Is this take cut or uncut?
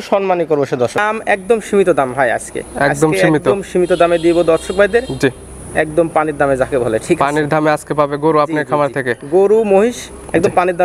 cut